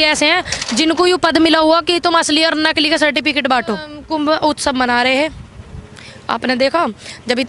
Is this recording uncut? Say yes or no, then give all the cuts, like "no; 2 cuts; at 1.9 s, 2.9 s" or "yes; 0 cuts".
no; 1 cut; at 3.9 s